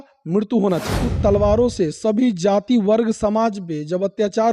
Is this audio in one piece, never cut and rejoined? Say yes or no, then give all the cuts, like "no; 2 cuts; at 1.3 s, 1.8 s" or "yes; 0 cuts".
no; 1 cut; at 1.0 s